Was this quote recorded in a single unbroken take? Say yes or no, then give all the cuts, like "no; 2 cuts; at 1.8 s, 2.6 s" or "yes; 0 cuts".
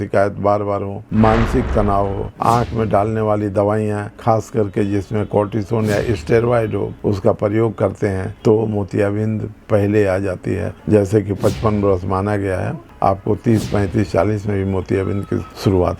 no; 3 cuts; at 2.3 s, 10.8 s, 12.8 s